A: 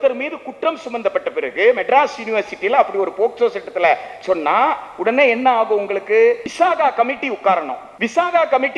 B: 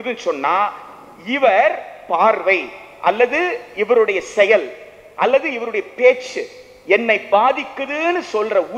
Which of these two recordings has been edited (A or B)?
A